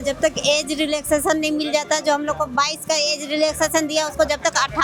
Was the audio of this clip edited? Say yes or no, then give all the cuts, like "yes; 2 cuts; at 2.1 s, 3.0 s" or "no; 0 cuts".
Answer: no; 0 cuts